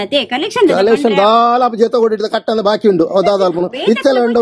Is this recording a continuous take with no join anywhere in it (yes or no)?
yes